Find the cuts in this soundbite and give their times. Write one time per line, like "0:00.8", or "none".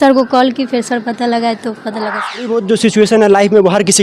0:02.4